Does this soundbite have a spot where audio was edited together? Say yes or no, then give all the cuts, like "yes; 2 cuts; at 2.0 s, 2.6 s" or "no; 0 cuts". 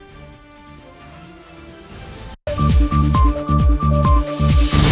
yes; 1 cut; at 2.4 s